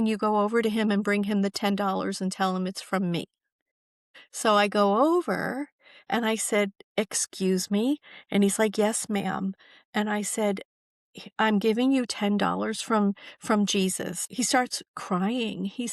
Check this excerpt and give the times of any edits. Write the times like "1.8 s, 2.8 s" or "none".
14.3 s